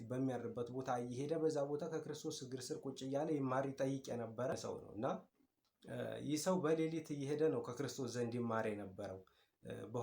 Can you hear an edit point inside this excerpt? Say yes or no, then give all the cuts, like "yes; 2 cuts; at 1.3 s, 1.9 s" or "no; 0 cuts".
yes; 1 cut; at 4.5 s